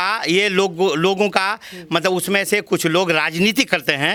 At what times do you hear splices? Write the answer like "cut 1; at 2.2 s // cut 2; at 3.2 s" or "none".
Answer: none